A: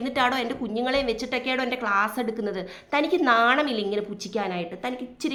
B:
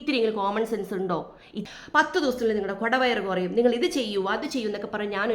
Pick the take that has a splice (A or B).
B